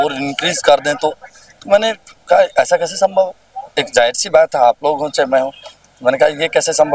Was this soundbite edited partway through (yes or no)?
no